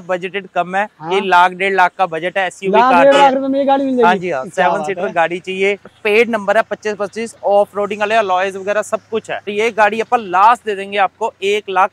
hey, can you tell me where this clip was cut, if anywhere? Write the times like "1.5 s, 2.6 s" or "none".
5.9 s, 9.5 s